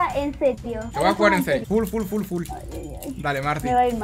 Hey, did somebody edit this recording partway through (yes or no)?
no